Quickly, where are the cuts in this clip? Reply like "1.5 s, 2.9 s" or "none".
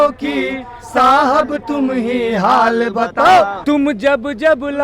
3.6 s